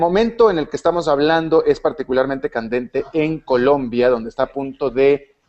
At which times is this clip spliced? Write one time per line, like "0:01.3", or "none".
none

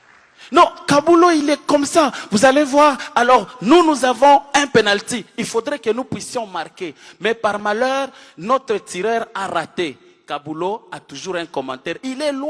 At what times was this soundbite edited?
none

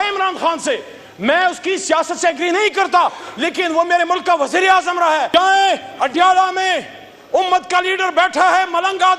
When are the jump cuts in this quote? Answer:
0:05.3

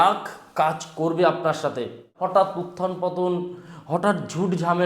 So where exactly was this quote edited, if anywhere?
0:02.1

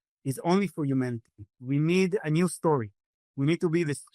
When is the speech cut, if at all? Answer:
0:01.6
0:03.1

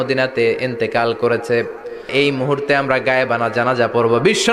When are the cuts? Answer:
0:02.1

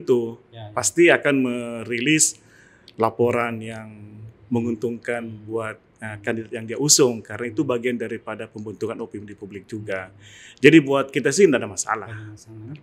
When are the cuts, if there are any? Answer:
none

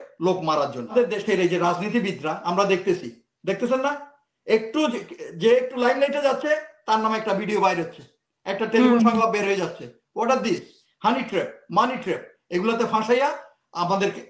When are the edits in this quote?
0:00.9

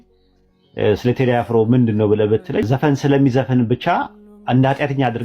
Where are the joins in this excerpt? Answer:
0:02.6

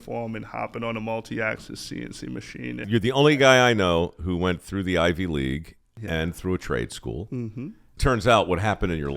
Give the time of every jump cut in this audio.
0:02.8
0:07.9

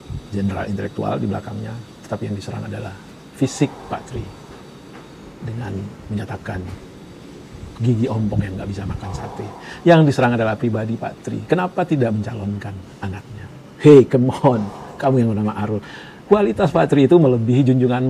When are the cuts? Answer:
none

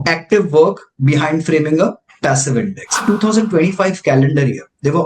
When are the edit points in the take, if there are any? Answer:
0:03.0

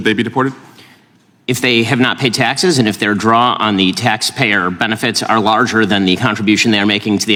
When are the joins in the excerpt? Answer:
none

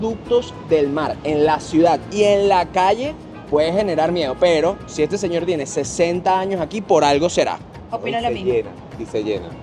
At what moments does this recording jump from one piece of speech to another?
none

